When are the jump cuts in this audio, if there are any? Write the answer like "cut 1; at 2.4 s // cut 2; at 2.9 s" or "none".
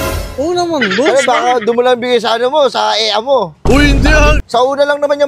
cut 1; at 4.4 s